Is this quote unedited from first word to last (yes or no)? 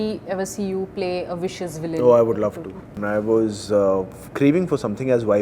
no